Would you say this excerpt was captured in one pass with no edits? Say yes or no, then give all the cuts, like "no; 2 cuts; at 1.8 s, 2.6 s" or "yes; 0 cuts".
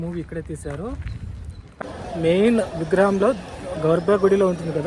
no; 1 cut; at 1.8 s